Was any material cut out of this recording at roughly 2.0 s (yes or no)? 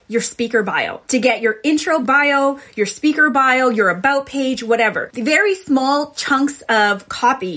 yes